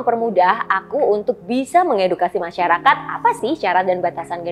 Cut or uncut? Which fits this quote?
uncut